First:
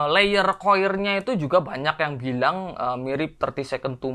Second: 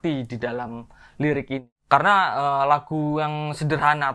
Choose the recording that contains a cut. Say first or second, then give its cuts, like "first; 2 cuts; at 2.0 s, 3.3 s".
second; 1 cut; at 1.7 s